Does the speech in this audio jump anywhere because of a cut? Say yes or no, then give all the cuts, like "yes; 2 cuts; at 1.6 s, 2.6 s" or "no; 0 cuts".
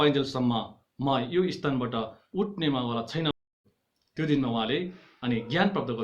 yes; 1 cut; at 3.4 s